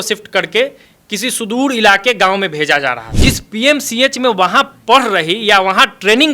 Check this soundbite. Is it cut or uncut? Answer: cut